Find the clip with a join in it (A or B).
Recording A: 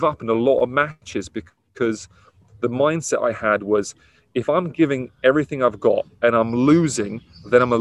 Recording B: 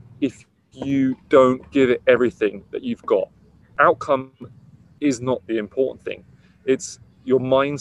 B